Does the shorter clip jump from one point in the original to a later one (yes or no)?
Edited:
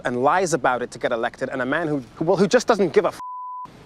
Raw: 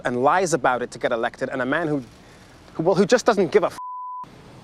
yes